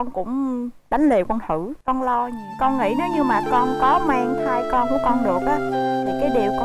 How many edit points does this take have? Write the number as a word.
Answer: one